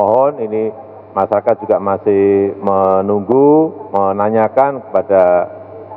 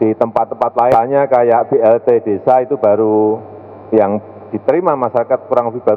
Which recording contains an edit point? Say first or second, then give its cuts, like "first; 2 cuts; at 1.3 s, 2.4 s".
second; 1 cut; at 0.9 s